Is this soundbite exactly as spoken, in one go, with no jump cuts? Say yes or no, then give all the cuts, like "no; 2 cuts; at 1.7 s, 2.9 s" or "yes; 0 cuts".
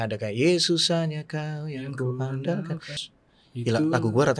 no; 1 cut; at 3.0 s